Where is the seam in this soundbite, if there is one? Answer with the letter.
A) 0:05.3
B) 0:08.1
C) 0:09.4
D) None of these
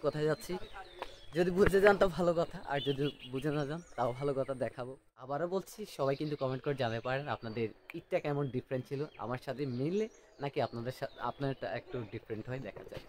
A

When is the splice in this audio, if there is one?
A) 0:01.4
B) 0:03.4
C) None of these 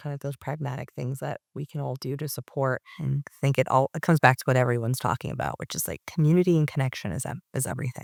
C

